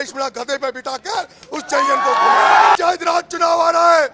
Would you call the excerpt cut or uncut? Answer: cut